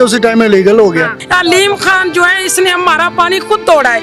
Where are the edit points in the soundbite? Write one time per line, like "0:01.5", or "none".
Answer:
0:01.2